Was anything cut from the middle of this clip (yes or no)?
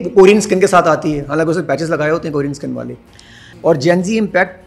yes